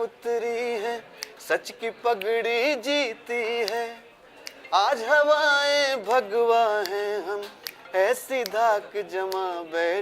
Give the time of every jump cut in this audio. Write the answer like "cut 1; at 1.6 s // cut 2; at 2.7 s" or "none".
none